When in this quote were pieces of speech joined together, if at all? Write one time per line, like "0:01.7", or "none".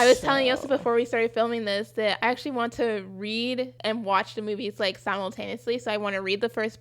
0:02.2
0:03.7